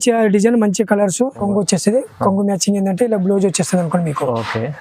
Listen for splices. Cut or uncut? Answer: cut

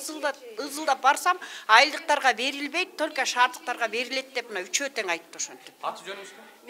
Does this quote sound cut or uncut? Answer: uncut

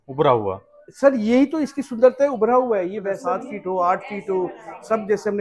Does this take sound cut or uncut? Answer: cut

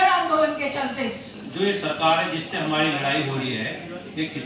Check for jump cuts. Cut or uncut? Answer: cut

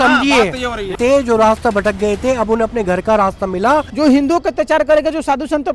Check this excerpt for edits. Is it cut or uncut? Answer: cut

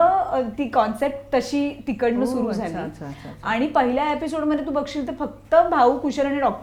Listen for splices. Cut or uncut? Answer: uncut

